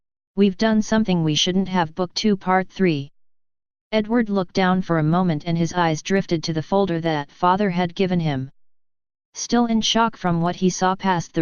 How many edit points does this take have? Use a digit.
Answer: 1